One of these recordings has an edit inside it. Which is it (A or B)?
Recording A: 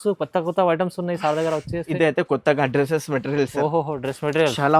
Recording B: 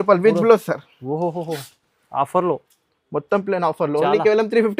A